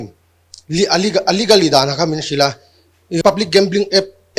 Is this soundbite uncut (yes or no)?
no